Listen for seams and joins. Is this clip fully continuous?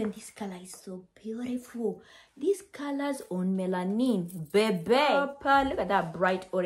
no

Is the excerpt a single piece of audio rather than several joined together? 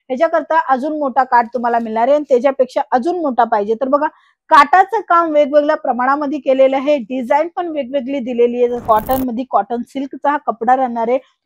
no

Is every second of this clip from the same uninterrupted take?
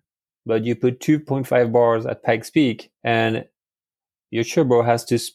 yes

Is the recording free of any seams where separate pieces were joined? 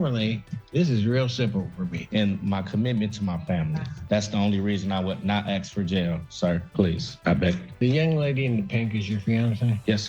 no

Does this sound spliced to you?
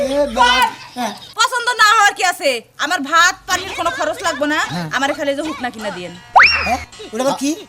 yes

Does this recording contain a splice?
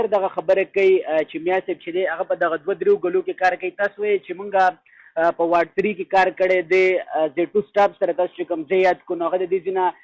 no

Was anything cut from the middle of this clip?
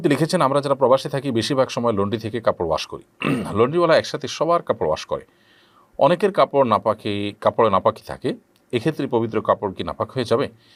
no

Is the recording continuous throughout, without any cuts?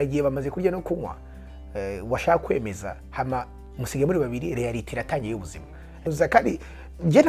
no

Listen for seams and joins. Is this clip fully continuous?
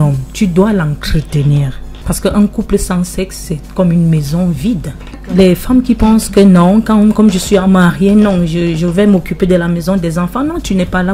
no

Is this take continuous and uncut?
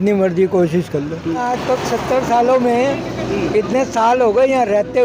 no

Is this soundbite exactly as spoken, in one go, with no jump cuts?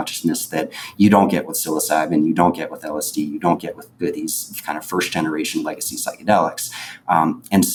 yes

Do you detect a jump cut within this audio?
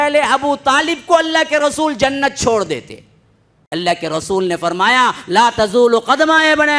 yes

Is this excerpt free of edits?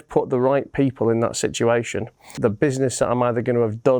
no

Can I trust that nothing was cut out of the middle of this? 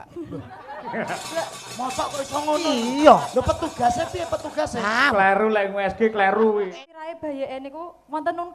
no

